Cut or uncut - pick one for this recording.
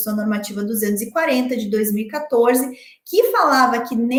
uncut